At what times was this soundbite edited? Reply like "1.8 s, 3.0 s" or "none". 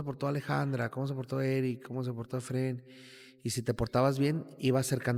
none

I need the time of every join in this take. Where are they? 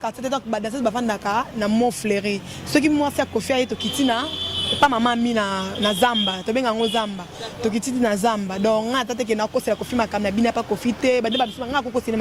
none

